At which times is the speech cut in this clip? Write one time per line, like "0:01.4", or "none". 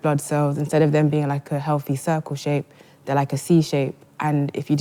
none